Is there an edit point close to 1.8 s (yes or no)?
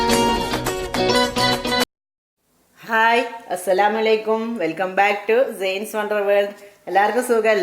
yes